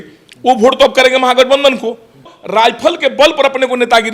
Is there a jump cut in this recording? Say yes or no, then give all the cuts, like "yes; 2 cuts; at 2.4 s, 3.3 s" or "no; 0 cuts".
yes; 1 cut; at 2.3 s